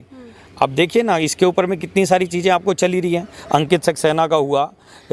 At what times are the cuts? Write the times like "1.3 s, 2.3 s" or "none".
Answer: none